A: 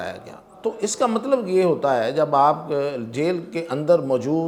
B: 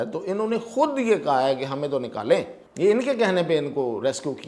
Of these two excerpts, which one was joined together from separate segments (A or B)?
B